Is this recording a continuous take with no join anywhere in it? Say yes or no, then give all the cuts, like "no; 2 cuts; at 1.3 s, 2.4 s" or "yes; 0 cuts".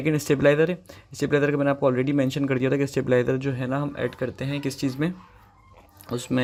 yes; 0 cuts